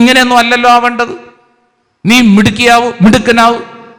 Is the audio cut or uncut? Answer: uncut